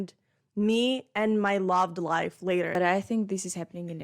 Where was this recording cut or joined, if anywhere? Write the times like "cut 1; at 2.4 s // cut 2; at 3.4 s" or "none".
cut 1; at 2.7 s